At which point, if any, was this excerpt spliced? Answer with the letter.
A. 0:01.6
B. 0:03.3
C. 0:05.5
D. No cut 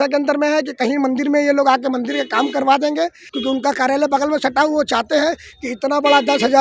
B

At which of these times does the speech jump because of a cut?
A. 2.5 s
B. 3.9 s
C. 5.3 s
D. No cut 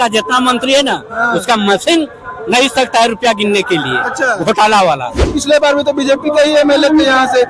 C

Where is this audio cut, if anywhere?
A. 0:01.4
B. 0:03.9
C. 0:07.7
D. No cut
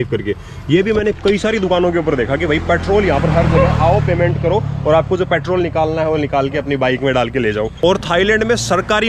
C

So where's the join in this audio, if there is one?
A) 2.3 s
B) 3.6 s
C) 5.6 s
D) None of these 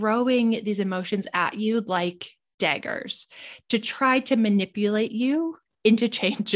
D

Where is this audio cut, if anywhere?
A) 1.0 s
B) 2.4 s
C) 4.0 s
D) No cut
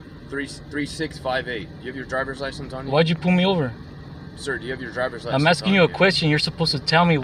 D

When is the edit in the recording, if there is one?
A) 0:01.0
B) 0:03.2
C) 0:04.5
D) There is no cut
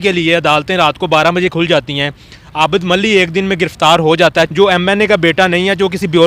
C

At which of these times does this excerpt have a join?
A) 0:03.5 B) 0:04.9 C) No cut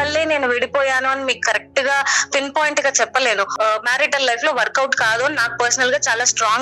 A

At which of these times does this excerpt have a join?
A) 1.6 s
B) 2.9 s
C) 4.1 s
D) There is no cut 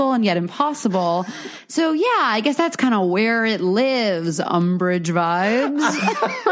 D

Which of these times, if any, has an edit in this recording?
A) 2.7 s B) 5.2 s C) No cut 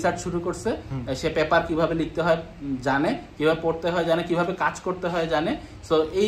C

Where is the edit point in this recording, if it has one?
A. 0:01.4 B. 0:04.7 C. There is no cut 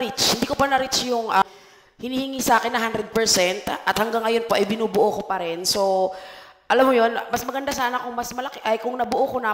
A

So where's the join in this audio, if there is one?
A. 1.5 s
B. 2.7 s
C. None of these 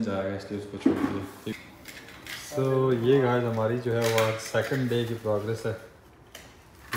A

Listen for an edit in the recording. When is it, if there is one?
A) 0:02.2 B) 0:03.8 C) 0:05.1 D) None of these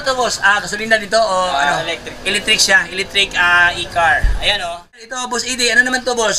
C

